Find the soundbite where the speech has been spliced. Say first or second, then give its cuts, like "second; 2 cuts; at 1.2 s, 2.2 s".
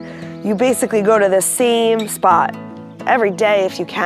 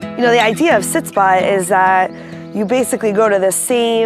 first; 1 cut; at 2.9 s